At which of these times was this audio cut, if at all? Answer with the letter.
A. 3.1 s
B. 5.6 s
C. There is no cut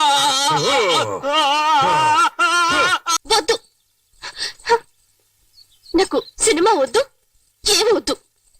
A